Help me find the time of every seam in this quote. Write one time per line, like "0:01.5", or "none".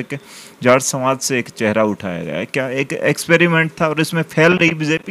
none